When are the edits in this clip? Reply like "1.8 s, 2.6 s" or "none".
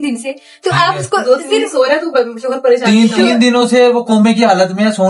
none